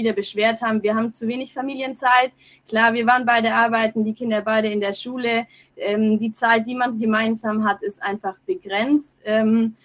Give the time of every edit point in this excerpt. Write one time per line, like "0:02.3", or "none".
none